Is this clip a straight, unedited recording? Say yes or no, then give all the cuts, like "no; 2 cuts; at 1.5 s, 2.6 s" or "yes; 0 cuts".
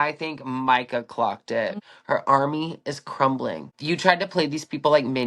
no; 2 cuts; at 1.8 s, 3.7 s